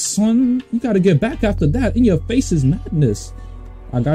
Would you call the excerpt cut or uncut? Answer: uncut